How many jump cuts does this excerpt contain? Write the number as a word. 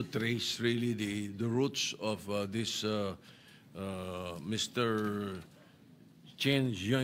zero